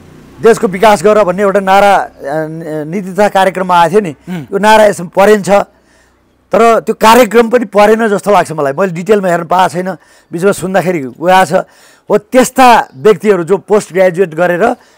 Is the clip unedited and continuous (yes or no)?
yes